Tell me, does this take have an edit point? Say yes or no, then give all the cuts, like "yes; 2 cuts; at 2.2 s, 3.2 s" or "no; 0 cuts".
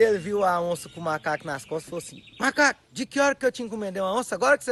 no; 0 cuts